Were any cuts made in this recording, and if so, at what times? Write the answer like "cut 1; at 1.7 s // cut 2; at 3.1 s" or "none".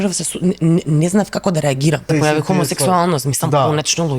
cut 1; at 2.0 s